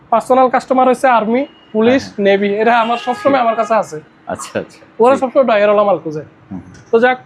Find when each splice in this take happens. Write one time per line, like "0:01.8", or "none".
none